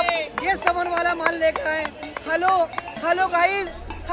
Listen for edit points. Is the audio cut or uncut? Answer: uncut